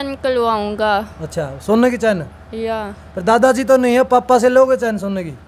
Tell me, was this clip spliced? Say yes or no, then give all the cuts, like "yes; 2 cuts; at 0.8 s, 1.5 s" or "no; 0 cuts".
no; 0 cuts